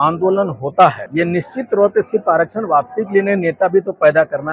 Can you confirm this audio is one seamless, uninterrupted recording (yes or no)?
no